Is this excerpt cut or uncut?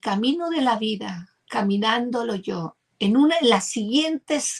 uncut